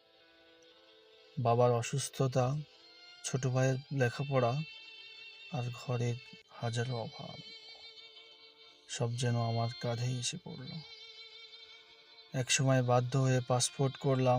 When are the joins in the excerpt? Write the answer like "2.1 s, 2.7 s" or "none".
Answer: 7.6 s, 8.9 s